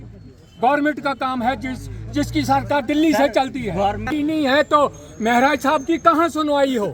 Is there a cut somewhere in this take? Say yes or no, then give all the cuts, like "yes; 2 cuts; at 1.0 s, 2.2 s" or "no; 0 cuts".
yes; 1 cut; at 4.1 s